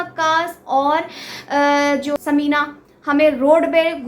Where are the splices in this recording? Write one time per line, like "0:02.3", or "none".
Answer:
0:02.1